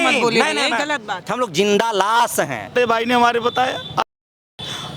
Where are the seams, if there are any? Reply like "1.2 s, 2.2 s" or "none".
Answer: 1.2 s, 2.8 s